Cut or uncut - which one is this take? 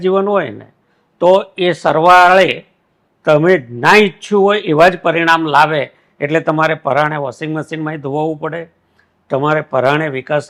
uncut